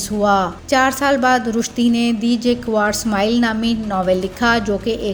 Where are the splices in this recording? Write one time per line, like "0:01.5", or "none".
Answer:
none